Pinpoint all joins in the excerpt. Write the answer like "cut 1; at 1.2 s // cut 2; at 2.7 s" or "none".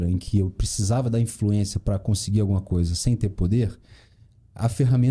none